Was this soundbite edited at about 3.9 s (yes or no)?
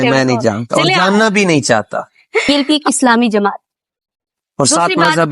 no